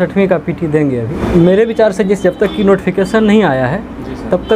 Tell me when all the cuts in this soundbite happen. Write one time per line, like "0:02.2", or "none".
0:01.1